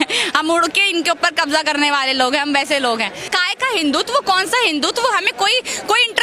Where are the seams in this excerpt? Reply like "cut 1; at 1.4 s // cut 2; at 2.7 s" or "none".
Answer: cut 1; at 3.3 s